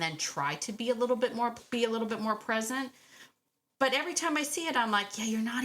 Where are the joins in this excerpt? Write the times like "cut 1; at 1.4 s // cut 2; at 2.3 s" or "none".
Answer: cut 1; at 1.6 s